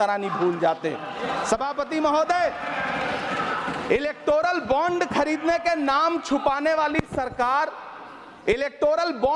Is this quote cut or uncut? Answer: uncut